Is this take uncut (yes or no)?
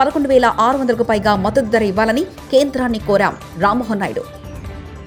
yes